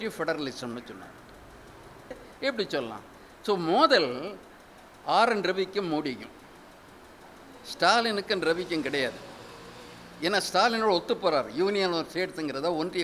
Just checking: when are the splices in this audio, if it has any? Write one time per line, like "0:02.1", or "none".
0:02.3